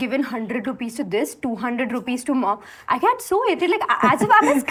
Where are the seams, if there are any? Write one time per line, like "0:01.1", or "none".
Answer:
none